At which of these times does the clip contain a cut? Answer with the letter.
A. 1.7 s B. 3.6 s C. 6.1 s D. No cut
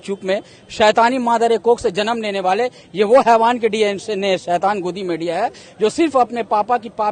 D